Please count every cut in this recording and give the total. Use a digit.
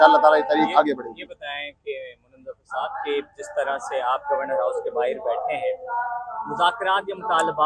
0